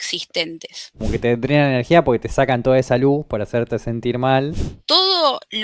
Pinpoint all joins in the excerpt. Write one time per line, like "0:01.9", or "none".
0:01.1
0:04.7